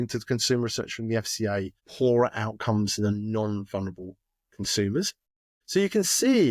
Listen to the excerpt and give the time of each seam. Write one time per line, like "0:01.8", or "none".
0:01.8
0:05.4